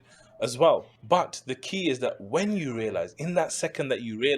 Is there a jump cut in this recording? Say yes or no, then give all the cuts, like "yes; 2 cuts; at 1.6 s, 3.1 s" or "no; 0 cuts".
yes; 1 cut; at 0.9 s